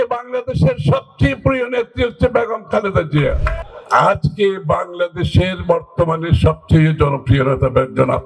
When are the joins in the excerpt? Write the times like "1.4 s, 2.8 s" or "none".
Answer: 3.5 s